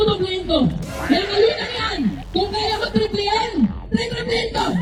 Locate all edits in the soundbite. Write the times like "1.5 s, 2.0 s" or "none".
none